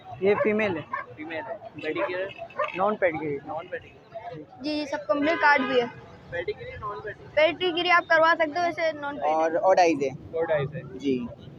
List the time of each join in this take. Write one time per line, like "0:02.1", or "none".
0:04.4
0:09.0

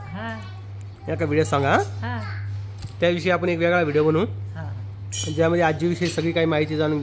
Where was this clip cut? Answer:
none

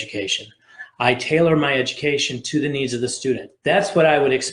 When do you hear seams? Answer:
0:03.5

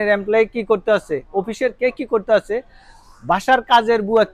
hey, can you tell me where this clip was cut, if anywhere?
none

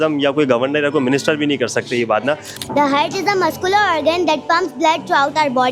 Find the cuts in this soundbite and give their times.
0:02.5

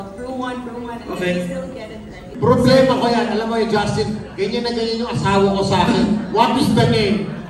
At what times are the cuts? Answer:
0:02.3

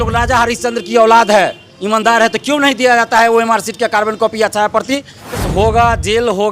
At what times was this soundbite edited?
0:05.4

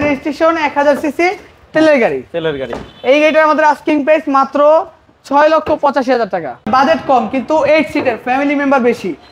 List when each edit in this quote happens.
0:06.7

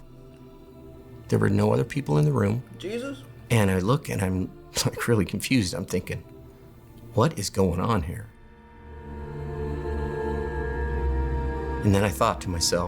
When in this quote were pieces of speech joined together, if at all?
0:11.8

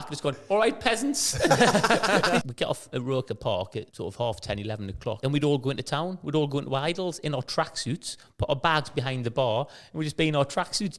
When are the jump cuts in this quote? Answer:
0:02.4
0:03.9
0:05.2

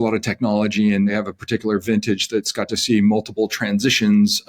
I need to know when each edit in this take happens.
0:01.1

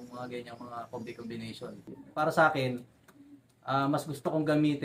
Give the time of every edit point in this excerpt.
0:02.0

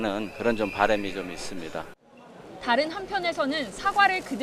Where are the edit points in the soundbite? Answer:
0:03.0

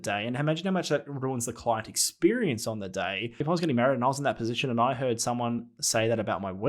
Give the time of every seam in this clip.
0:03.4

